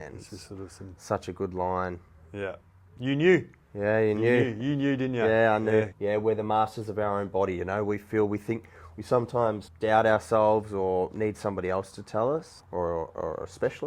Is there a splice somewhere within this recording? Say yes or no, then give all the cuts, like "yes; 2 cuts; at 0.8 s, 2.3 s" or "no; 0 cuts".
yes; 3 cuts; at 5.9 s, 9.7 s, 12.6 s